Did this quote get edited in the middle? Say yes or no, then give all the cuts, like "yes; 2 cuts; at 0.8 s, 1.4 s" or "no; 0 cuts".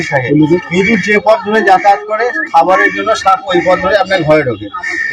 no; 0 cuts